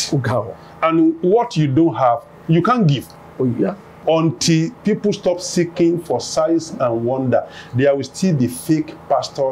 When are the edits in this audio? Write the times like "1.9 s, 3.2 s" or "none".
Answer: 3.9 s